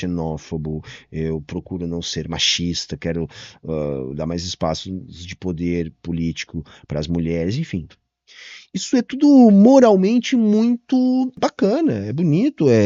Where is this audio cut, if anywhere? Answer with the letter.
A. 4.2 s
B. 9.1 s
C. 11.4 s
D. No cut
C